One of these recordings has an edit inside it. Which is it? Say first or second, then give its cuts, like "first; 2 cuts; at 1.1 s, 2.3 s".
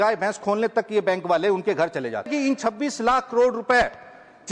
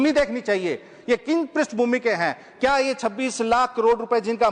first; 1 cut; at 2.3 s